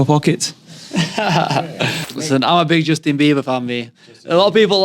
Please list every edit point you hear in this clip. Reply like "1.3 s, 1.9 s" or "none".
2.1 s